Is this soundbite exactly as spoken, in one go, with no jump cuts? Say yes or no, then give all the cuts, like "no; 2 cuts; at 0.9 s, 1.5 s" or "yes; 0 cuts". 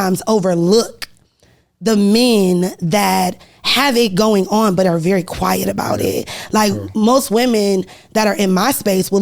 yes; 0 cuts